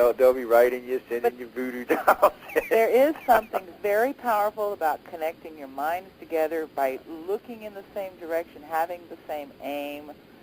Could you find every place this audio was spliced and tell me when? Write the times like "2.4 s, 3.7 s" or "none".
3.0 s

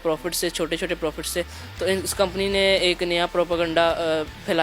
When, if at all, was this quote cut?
none

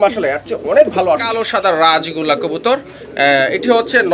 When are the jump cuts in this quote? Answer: 1.3 s

